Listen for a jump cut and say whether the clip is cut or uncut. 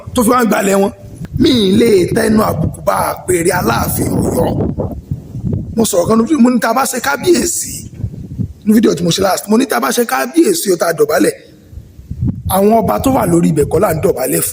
cut